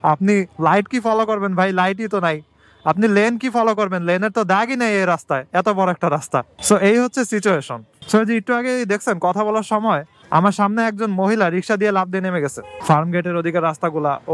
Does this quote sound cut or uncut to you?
cut